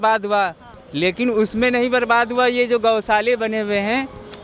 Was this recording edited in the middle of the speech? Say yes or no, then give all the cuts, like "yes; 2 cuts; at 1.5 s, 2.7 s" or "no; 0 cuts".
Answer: no; 0 cuts